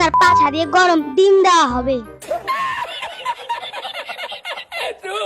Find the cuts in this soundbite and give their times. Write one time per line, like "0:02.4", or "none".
0:02.1